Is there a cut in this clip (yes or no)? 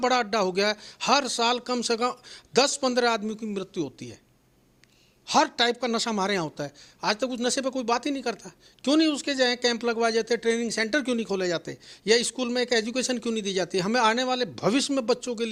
no